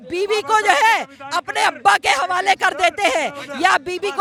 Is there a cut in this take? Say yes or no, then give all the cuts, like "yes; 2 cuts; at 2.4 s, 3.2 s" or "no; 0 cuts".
no; 0 cuts